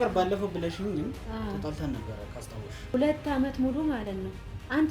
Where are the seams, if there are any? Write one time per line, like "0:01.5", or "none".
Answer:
0:02.9